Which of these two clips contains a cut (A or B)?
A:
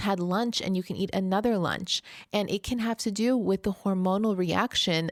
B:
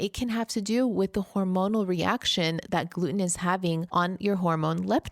B